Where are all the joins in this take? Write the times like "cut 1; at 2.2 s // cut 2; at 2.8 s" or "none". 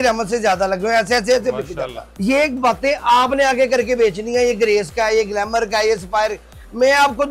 cut 1; at 2.1 s